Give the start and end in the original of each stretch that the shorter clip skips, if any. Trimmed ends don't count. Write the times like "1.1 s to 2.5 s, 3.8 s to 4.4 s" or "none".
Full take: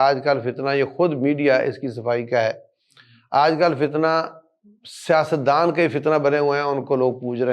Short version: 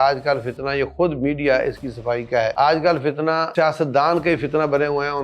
2.5 s to 3.3 s, 4.2 s to 5.0 s